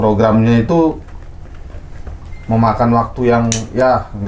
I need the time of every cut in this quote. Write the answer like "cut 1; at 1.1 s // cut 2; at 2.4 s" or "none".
none